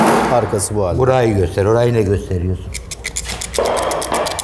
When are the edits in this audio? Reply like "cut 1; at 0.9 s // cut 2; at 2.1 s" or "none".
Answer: none